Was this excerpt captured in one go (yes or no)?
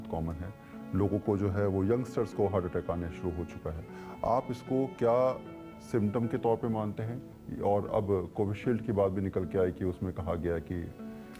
yes